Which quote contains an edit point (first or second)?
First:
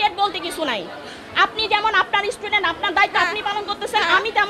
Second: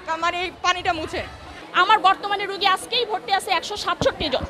second